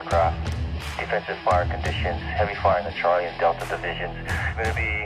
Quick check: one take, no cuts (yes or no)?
yes